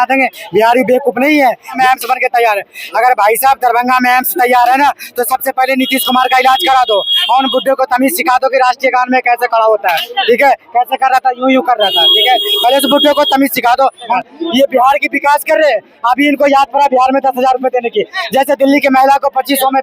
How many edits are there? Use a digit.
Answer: 2